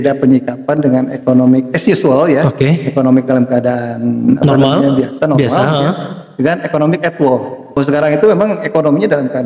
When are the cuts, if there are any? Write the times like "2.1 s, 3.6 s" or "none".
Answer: 7.8 s